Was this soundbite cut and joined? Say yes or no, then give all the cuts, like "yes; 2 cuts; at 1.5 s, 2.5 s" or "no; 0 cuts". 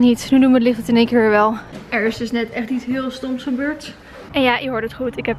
yes; 2 cuts; at 1.7 s, 4.2 s